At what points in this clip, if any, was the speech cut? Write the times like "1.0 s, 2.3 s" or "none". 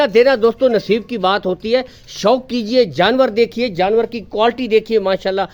none

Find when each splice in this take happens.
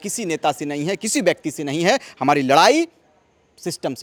none

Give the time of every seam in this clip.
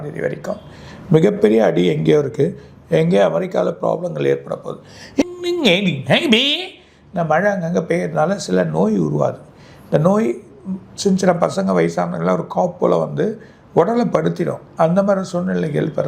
5.2 s

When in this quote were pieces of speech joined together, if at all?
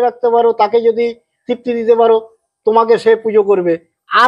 none

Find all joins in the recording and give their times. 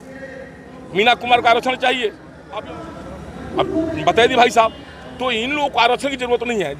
2.3 s

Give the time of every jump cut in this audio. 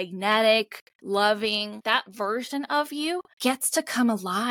0.9 s, 1.8 s, 3.3 s

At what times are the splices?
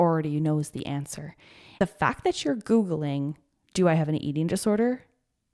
1.8 s

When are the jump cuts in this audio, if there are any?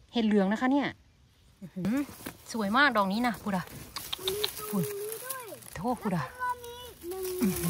1.8 s, 5.8 s

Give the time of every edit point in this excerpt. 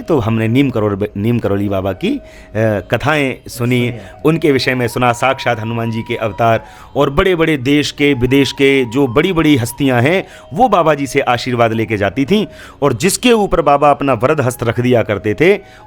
none

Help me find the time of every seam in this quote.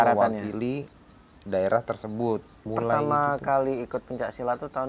2.7 s

